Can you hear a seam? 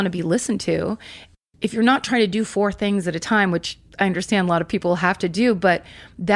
yes; 2 cuts; at 1.2 s, 3.8 s

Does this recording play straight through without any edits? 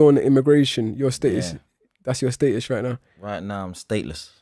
yes; 0 cuts

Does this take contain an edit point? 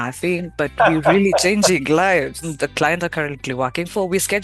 yes; 1 cut; at 2.5 s

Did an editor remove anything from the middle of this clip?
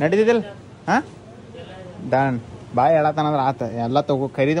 no; 0 cuts

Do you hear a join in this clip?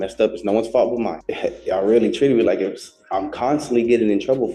yes; 1 cut; at 1.2 s

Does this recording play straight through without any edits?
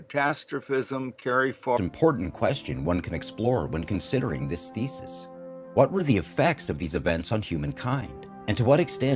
yes; 0 cuts

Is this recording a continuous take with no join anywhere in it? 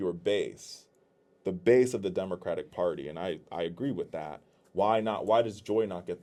yes; 0 cuts

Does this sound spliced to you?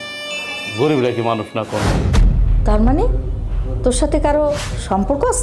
yes; 1 cut; at 2.0 s

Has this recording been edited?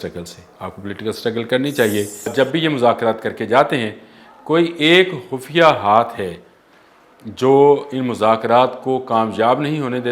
yes; 1 cut; at 2.3 s

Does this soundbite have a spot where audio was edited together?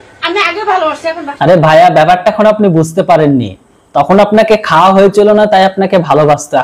yes; 1 cut; at 1.3 s

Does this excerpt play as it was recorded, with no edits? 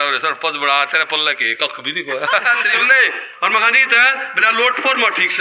no; 1 cut; at 2.8 s

